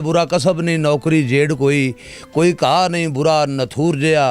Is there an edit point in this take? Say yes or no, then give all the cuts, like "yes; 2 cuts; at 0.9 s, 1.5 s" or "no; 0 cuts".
no; 0 cuts